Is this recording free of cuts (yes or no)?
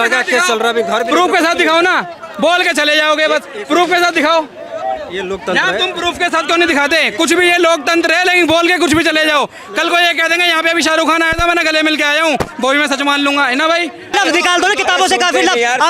no